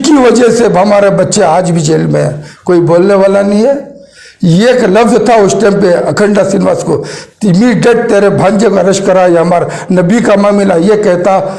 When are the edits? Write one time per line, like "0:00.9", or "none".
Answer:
0:02.4